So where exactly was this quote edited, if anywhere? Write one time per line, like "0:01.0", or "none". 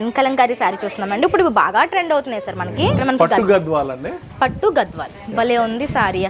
0:03.0